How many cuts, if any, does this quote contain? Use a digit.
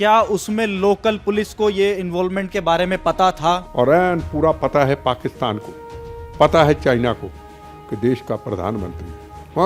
1